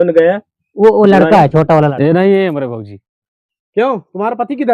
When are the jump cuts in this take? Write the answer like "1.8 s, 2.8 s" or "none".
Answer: 1.9 s